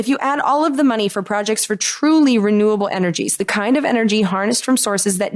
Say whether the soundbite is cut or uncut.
uncut